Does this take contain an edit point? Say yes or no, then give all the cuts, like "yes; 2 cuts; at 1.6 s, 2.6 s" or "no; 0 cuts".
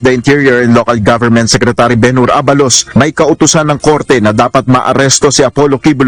no; 0 cuts